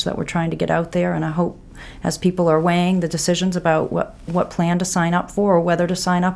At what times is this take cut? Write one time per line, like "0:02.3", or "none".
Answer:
none